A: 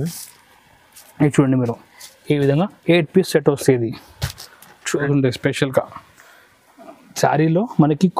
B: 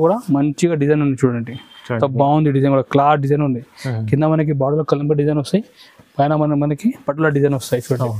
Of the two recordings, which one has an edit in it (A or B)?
A